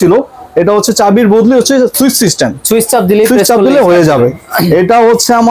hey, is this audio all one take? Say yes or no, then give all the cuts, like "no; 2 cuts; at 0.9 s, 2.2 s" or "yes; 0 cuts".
yes; 0 cuts